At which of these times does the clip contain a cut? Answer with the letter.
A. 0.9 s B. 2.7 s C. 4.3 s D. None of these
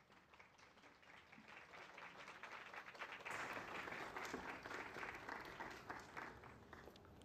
C